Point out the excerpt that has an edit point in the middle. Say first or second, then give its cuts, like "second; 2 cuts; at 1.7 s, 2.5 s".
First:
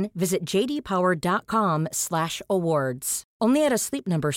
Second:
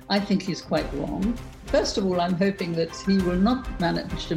second; 1 cut; at 1.6 s